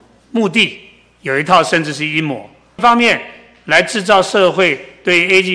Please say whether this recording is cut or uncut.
cut